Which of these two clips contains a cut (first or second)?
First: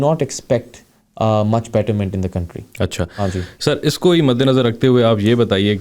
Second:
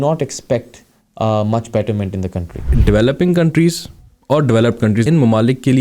second